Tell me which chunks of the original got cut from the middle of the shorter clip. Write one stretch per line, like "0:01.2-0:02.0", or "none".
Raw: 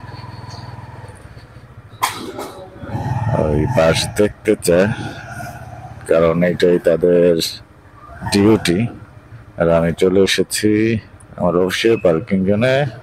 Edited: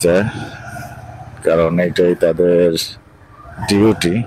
none